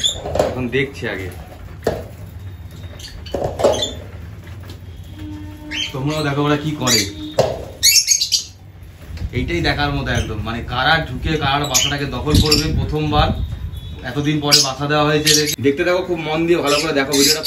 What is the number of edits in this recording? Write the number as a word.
one